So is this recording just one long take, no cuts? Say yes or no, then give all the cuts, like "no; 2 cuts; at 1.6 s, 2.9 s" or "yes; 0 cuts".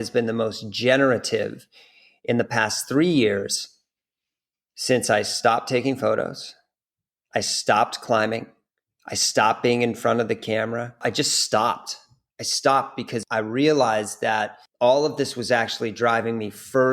no; 3 cuts; at 11.0 s, 13.3 s, 14.6 s